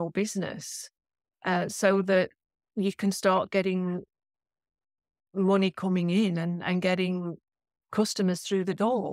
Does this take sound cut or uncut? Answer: uncut